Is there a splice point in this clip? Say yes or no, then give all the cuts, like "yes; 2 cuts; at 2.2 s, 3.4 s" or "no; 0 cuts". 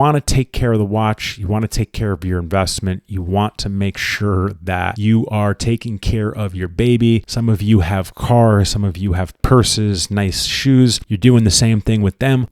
no; 0 cuts